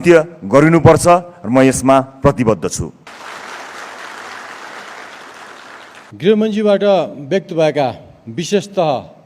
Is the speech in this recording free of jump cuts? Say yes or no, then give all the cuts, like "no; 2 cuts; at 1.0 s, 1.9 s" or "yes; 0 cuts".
no; 2 cuts; at 3.1 s, 6.0 s